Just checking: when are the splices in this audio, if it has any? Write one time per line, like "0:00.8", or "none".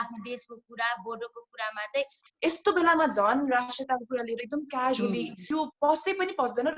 0:02.2
0:05.4